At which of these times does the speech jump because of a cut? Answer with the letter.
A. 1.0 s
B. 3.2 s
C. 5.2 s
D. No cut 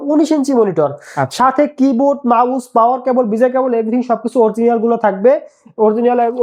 D